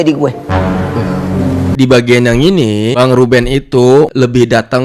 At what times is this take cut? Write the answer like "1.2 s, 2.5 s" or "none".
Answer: 1.7 s

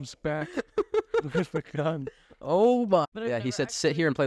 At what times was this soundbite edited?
3.1 s

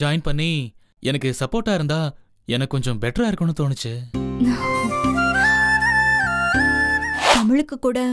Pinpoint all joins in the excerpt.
7.2 s

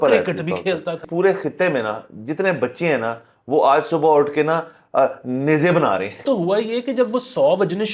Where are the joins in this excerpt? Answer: 1.0 s, 6.2 s

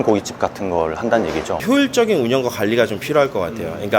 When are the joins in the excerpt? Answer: 1.6 s

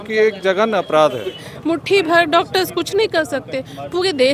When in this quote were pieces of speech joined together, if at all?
1.4 s

